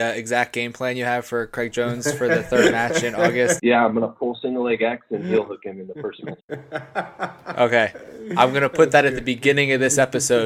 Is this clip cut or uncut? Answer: cut